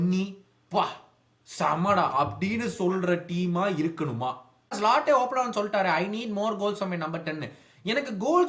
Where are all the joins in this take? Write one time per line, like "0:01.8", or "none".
0:04.7